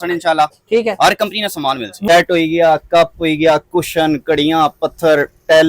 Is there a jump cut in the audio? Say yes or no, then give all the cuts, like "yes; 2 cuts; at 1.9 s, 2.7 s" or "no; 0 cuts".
yes; 1 cut; at 1.9 s